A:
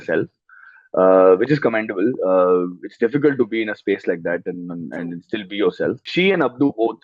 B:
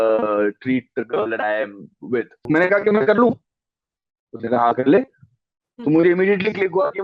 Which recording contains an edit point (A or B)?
B